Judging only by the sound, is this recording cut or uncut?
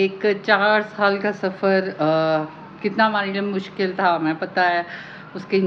uncut